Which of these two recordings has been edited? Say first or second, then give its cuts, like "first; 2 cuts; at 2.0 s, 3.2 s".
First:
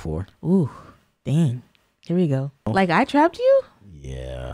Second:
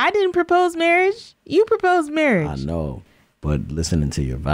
first; 1 cut; at 2.7 s